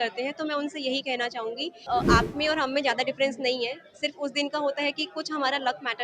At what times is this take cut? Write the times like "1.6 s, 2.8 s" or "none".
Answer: 1.8 s